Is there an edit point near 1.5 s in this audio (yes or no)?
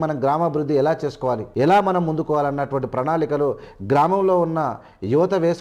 yes